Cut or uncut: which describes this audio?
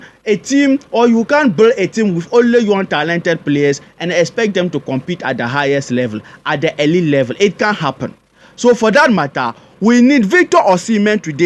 uncut